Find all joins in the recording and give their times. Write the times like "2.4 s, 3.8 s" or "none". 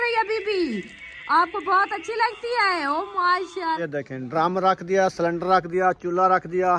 3.8 s